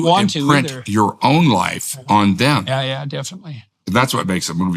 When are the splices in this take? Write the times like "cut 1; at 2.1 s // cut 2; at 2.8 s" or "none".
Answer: cut 1; at 3.7 s